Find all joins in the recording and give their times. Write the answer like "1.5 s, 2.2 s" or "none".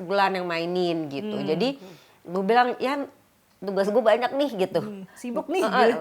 none